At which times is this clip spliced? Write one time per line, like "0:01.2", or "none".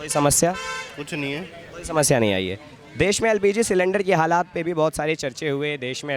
none